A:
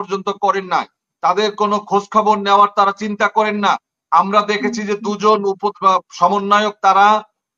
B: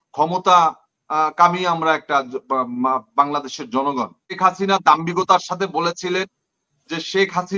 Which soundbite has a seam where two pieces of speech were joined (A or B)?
B